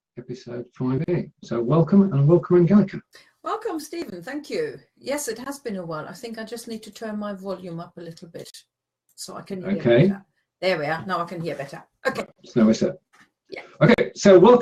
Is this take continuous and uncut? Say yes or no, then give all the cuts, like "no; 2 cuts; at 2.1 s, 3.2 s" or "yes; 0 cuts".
yes; 0 cuts